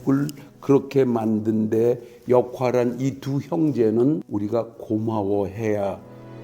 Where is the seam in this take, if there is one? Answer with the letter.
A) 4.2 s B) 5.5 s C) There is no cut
A